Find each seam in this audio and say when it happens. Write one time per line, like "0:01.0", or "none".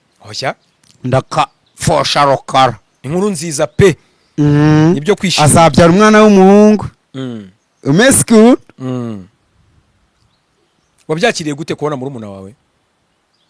none